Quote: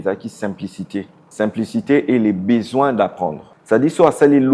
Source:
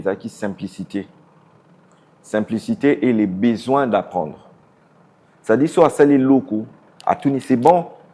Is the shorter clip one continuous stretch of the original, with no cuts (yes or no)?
no